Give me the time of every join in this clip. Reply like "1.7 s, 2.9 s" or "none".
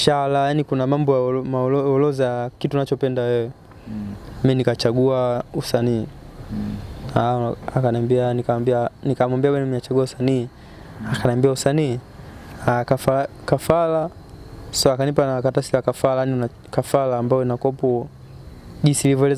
none